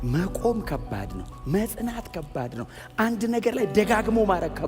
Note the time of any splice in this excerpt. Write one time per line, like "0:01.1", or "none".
none